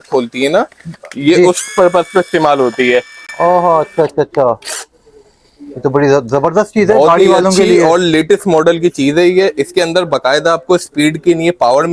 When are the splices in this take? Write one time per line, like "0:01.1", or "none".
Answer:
none